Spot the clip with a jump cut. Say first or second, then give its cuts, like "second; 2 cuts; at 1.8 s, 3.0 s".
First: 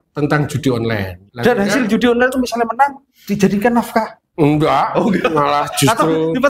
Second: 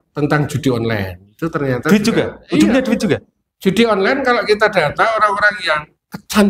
first; 1 cut; at 1.2 s